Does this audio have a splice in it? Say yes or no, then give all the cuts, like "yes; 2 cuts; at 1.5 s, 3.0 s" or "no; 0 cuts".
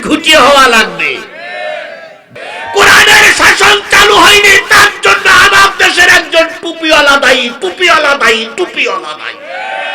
yes; 1 cut; at 2.3 s